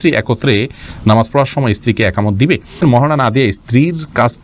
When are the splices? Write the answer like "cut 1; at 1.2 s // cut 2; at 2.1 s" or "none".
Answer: cut 1; at 2.8 s